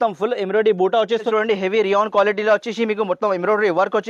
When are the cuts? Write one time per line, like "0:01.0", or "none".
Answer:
0:01.3